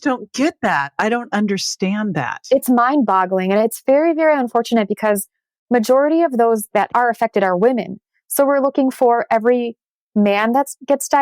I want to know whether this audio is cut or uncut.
cut